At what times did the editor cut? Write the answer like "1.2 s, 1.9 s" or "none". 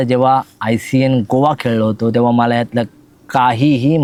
none

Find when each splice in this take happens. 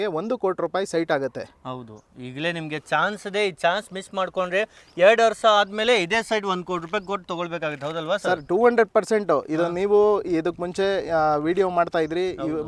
none

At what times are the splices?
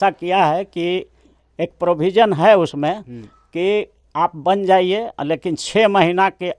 none

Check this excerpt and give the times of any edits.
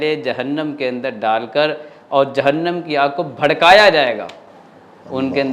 none

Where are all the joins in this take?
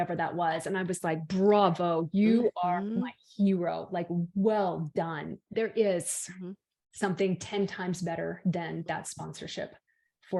5.3 s

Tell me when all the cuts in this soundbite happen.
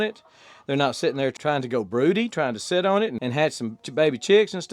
1.3 s

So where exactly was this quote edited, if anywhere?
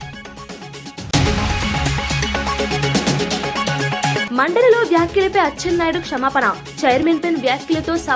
1.0 s, 4.2 s

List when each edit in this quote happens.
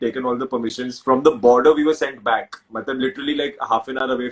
none

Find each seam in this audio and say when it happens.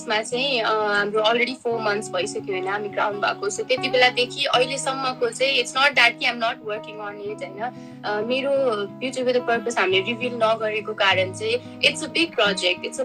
none

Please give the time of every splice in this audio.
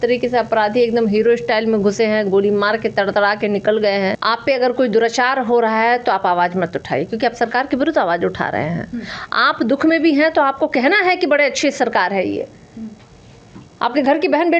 4.2 s

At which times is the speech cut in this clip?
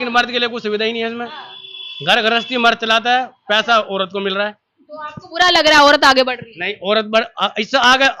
none

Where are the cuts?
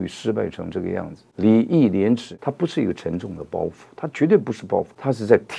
1.3 s, 2.3 s

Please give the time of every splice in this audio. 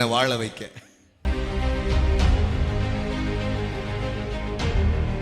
1.2 s

